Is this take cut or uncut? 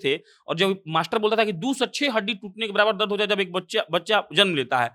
uncut